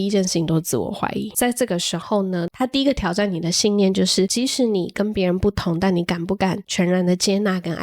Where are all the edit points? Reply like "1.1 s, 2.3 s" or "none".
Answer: 1.3 s, 4.3 s